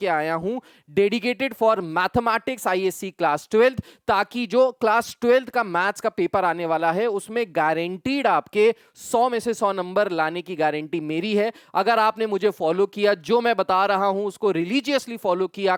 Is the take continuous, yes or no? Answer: yes